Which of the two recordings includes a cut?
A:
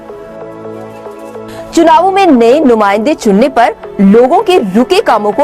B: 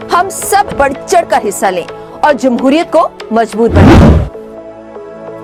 A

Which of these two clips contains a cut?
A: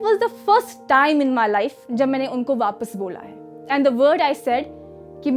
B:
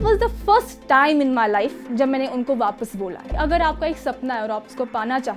B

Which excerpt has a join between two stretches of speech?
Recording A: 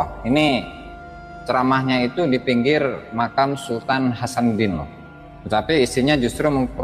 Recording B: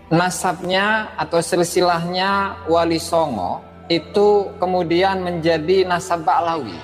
B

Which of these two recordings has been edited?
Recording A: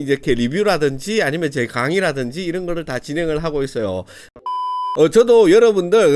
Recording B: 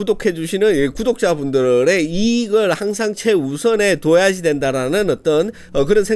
A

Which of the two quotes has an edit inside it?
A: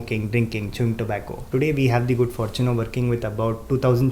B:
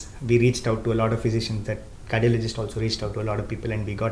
A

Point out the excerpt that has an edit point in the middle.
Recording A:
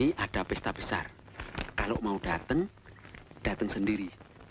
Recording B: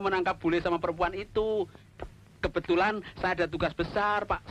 B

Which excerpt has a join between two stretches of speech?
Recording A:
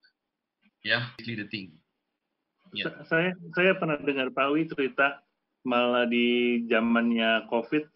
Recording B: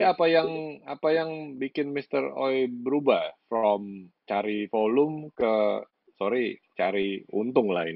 A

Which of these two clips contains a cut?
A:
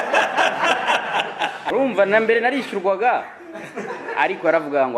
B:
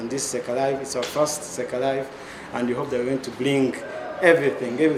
A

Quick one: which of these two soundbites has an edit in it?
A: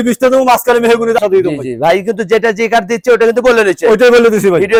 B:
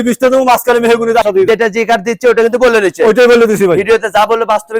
B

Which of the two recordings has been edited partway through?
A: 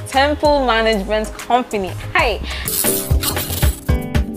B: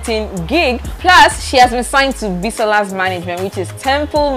A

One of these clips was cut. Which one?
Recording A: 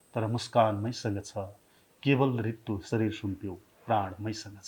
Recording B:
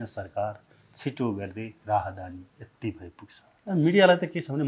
B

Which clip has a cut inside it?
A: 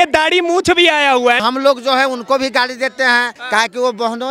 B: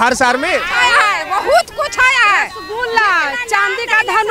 A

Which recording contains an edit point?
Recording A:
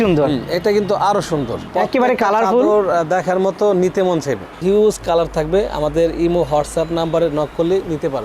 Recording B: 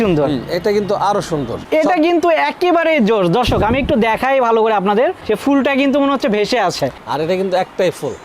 B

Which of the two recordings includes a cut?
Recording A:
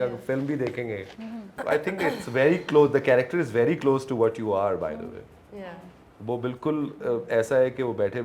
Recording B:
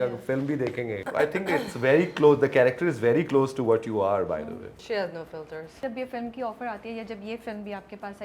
B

